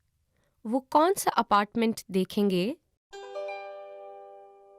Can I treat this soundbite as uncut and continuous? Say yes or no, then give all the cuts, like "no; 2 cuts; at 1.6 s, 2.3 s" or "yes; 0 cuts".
no; 1 cut; at 3.0 s